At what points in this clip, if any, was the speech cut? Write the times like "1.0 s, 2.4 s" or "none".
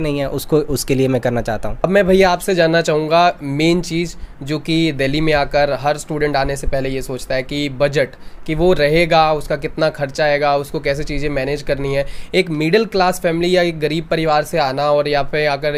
none